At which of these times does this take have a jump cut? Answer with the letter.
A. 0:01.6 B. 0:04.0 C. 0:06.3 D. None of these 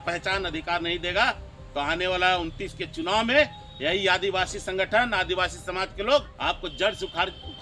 C